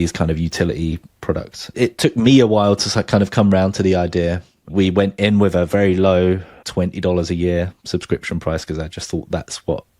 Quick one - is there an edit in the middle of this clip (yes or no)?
yes